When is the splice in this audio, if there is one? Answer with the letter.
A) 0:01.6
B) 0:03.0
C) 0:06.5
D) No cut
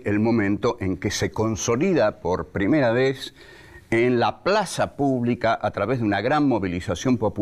D